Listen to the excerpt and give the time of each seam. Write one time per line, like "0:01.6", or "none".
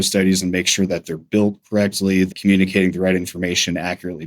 0:02.3